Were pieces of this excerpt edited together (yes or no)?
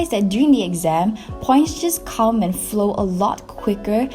no